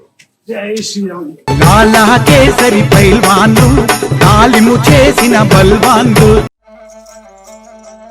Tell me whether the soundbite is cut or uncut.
cut